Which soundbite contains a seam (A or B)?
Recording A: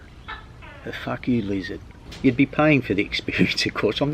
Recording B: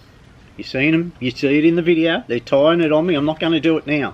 A